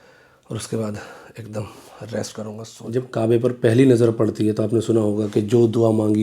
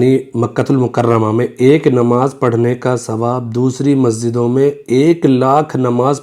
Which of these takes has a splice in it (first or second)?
first